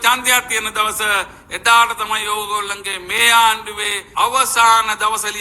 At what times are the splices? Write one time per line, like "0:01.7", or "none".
0:04.0